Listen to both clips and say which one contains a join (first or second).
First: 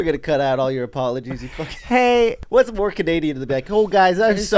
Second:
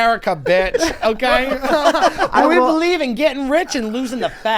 first